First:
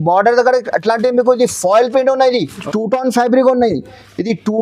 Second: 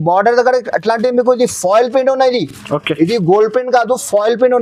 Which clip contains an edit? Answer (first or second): first